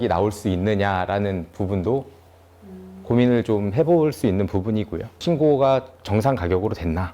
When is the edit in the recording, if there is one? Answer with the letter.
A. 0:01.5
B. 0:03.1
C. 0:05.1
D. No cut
C